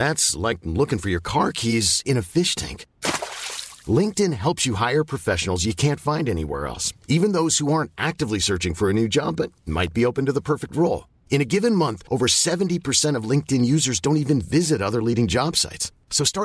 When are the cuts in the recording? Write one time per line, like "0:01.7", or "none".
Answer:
none